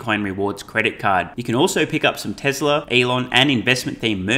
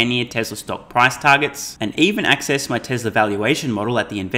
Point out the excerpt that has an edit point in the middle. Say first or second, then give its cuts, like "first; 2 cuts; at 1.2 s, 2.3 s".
first; 1 cut; at 2.9 s